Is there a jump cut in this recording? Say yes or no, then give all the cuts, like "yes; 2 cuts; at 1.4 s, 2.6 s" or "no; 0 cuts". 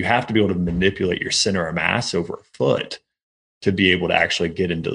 no; 0 cuts